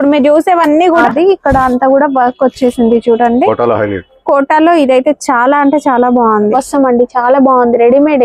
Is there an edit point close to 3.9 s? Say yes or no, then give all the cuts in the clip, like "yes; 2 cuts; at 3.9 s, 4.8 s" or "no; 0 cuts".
no; 2 cuts; at 1.1 s, 6.5 s